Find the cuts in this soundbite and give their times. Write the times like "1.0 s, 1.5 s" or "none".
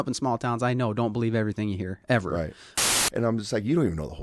2.8 s